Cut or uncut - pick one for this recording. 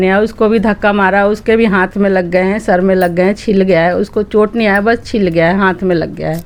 uncut